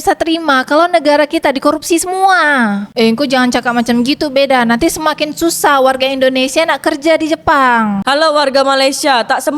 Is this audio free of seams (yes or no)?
no